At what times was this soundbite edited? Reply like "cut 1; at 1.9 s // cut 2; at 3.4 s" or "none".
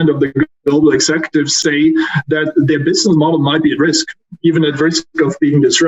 cut 1; at 1.6 s